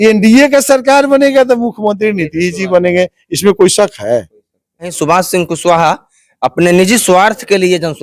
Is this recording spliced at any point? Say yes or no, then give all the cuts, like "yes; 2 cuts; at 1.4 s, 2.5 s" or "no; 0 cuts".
yes; 1 cut; at 5.0 s